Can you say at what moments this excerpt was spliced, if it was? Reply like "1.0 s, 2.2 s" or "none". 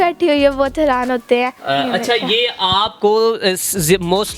1.6 s